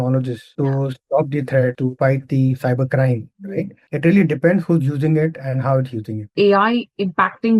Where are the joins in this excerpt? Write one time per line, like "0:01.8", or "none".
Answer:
0:06.2